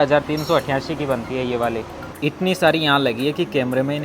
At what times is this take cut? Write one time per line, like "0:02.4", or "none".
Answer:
0:02.0